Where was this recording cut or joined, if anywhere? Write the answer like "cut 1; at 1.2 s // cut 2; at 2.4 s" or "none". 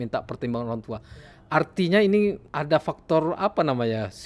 cut 1; at 2.5 s